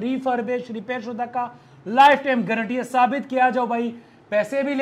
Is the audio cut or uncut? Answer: uncut